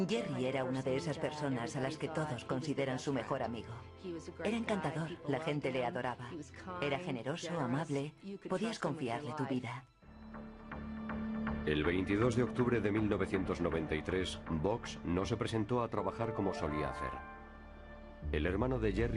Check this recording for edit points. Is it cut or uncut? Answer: uncut